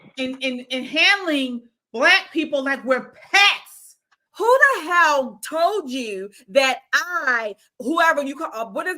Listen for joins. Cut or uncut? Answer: cut